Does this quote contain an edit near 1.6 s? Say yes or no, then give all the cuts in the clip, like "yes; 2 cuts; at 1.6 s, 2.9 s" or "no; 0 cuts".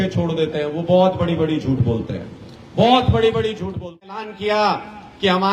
no; 1 cut; at 4.3 s